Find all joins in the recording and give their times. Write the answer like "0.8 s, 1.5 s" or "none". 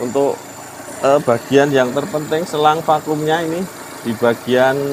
none